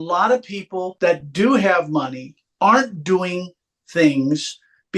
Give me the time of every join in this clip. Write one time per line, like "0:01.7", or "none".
0:00.9